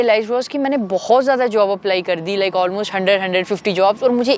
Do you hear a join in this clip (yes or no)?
no